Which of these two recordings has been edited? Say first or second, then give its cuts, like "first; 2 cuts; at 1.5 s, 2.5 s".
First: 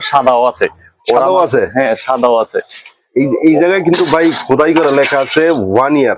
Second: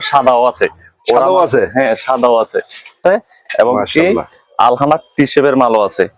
second; 1 cut; at 3.0 s